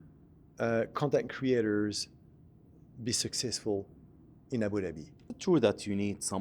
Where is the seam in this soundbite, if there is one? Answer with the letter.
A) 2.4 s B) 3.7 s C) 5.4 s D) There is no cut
C